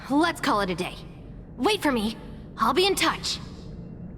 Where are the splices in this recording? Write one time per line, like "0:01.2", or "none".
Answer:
0:03.2

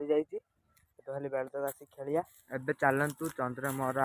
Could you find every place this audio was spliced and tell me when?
0:02.4

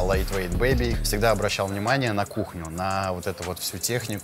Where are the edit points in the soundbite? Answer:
0:01.0

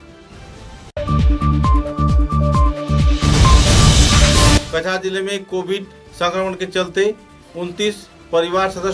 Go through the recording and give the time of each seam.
0:00.8
0:04.6

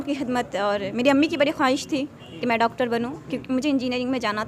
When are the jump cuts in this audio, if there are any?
none

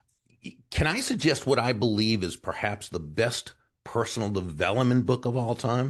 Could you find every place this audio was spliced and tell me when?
none

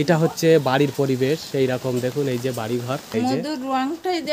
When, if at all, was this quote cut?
0:03.1

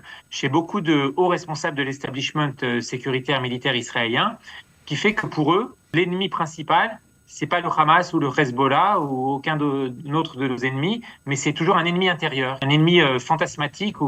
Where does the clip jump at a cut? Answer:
0:05.8
0:12.6

